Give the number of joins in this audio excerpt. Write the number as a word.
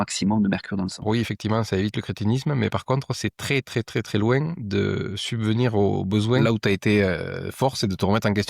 two